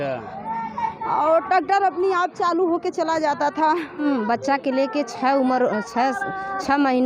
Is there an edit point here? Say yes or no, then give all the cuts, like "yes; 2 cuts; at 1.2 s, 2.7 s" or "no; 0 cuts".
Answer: yes; 1 cut; at 4.0 s